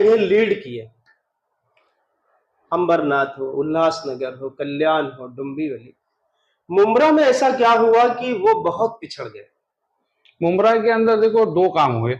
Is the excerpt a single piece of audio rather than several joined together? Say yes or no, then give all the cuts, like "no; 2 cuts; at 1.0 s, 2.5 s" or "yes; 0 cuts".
yes; 0 cuts